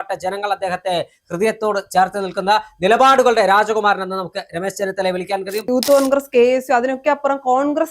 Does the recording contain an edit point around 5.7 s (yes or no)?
yes